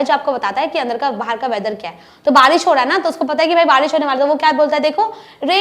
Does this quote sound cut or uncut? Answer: uncut